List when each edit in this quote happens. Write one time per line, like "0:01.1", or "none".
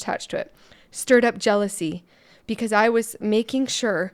none